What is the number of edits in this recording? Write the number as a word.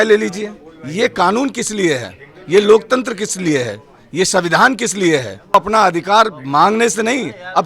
one